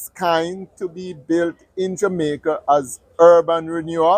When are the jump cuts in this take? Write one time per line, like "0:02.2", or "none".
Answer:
none